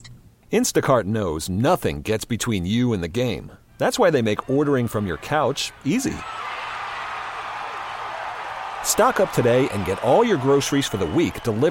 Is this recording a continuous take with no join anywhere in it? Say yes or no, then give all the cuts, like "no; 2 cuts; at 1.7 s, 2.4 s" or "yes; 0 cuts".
yes; 0 cuts